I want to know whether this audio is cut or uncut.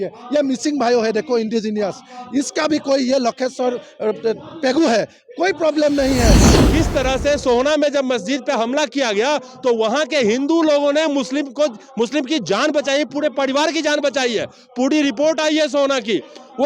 cut